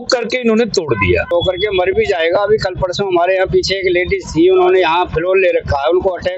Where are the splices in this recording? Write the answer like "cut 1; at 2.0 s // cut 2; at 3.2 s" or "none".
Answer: cut 1; at 1.3 s